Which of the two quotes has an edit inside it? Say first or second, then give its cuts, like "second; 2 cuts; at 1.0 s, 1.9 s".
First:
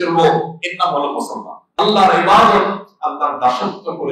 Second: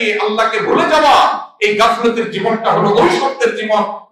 first; 1 cut; at 1.6 s